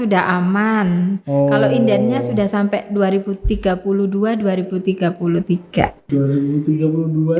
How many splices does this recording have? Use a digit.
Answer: 1